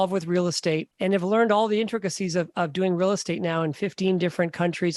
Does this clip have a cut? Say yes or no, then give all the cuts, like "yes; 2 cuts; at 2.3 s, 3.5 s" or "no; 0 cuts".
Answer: yes; 1 cut; at 0.9 s